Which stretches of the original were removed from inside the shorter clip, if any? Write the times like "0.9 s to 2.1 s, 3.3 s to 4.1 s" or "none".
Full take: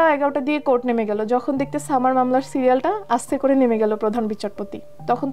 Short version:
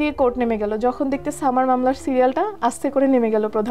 none